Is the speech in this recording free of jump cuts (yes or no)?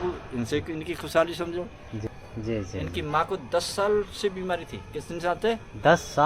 no